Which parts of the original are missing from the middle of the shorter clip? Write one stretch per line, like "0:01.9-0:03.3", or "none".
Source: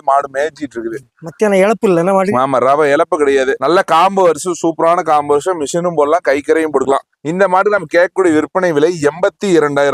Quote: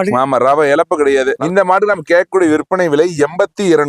0:03.6-0:07.2